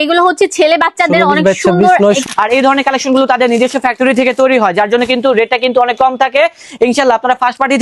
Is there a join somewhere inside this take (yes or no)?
yes